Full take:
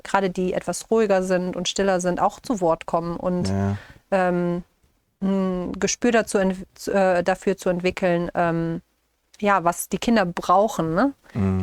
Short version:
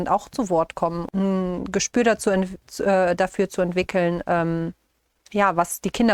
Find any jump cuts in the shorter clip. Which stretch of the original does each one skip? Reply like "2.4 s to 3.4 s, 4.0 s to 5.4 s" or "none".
3.1 s to 5.1 s